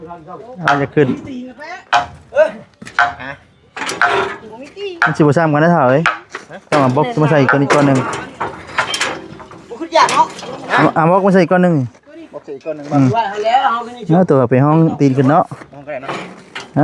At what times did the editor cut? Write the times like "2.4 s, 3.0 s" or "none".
none